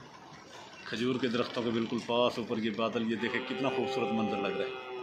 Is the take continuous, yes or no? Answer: yes